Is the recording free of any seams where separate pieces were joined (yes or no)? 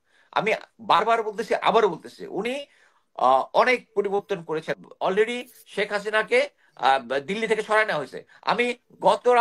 no